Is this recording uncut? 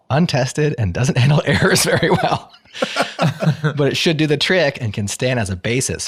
yes; 0 cuts

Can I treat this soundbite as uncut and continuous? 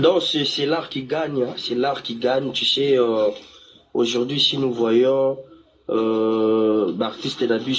yes; 0 cuts

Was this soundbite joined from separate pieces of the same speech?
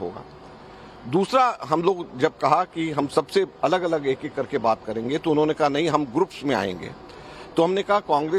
yes; 1 cut; at 5.2 s

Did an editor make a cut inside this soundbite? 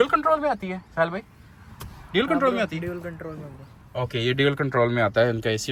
no; 0 cuts

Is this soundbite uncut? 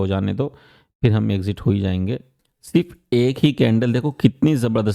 no; 1 cut; at 2.2 s

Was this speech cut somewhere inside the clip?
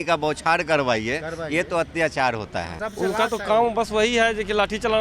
yes; 1 cut; at 2.8 s

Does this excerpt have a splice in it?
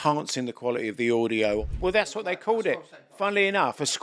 yes; 1 cut; at 1.6 s

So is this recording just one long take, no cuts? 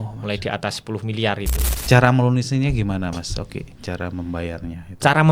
no; 1 cut; at 1.6 s

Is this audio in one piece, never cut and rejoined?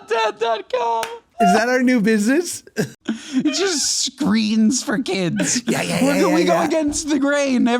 no; 2 cuts; at 1.3 s, 2.9 s

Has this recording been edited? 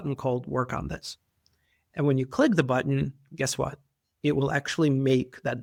no; 0 cuts

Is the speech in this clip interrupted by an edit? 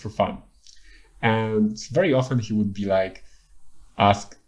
no; 0 cuts

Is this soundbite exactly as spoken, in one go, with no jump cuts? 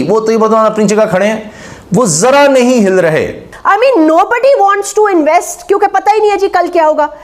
no; 1 cut; at 3.5 s

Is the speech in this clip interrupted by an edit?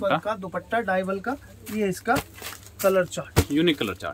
no; 0 cuts

